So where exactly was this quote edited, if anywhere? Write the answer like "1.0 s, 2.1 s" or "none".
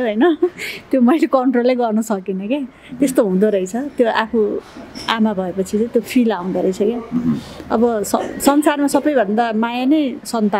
none